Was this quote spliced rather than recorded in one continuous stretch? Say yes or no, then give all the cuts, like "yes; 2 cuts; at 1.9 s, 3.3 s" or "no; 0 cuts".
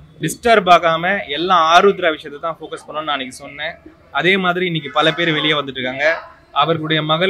no; 0 cuts